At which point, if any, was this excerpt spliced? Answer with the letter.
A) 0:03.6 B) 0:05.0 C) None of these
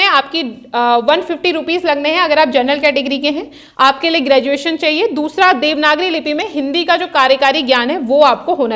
A